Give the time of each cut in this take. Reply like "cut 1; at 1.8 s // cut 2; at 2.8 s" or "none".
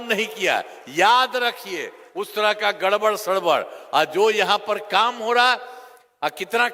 none